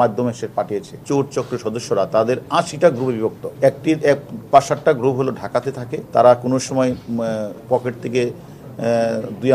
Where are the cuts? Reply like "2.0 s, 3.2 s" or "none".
1.0 s, 3.4 s, 5.9 s